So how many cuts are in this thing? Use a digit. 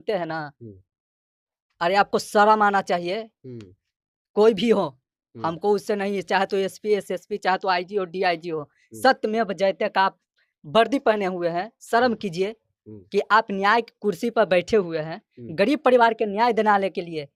0